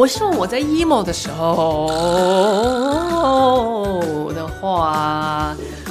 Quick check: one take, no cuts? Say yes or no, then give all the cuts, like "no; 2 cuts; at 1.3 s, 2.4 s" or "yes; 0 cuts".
yes; 0 cuts